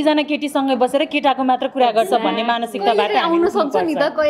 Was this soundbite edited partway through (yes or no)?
no